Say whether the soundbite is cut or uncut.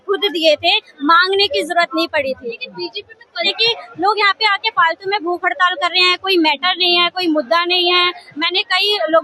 cut